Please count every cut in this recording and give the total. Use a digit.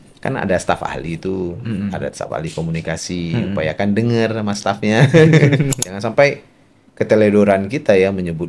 1